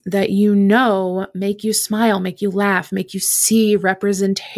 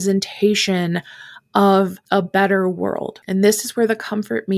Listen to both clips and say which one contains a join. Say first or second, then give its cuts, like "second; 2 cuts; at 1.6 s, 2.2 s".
second; 2 cuts; at 2.0 s, 3.1 s